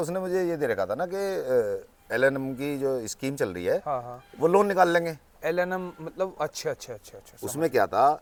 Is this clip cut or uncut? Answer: uncut